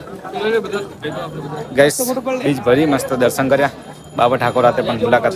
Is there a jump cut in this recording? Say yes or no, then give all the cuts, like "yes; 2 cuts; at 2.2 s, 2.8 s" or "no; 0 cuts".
no; 0 cuts